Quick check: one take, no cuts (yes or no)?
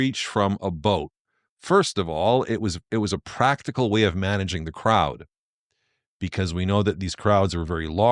yes